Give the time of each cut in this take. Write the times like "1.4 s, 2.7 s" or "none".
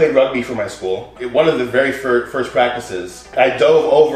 1.1 s, 3.3 s